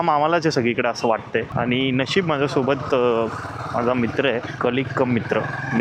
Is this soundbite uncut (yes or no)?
yes